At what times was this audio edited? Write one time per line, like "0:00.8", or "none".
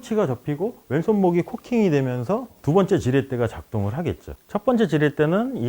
0:04.3